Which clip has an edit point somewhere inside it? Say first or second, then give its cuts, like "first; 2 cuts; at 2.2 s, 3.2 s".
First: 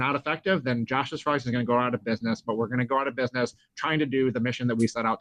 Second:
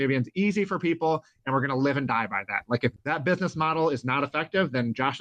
second; 1 cut; at 3.0 s